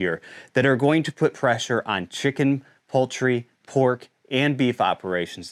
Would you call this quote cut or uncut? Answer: uncut